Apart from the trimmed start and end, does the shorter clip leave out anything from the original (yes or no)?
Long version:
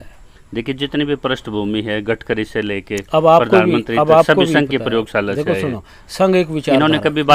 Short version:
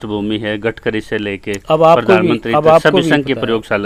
no